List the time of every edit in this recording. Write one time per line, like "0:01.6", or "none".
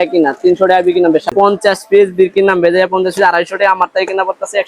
0:01.3